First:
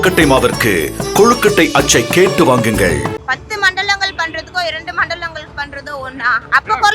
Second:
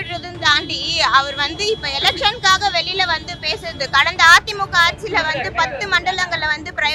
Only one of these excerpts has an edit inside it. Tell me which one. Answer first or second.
first